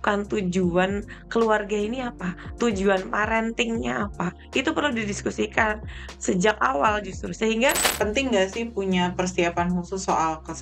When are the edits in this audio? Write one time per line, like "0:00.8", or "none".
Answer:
0:07.8